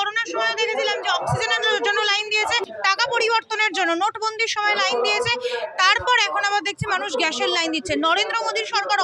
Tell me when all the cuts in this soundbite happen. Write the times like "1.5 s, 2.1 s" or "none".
2.6 s

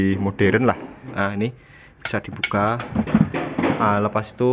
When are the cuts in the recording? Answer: 1.1 s

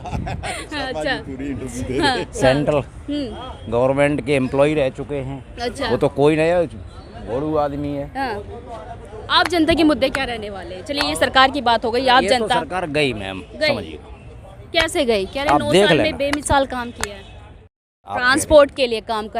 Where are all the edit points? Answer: none

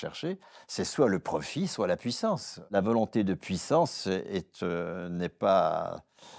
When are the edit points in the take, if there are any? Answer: 2.7 s

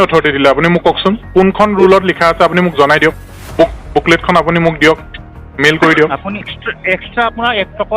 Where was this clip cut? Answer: 6.5 s

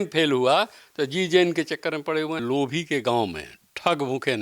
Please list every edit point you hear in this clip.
2.4 s

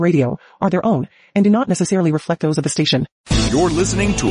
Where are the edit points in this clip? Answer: 3.2 s

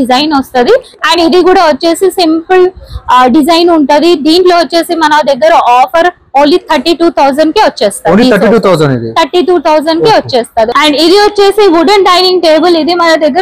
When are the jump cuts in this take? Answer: 10.7 s

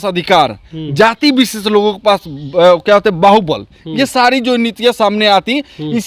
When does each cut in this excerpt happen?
none

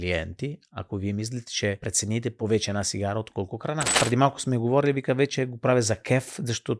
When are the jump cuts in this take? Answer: 2.1 s, 4.0 s

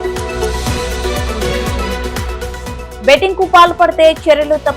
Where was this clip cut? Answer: 2.9 s

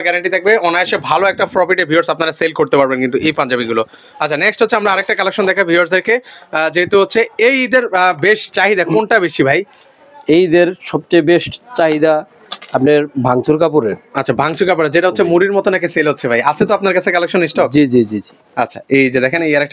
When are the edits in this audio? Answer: none

